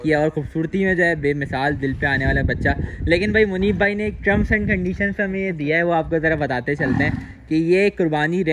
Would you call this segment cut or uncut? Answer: uncut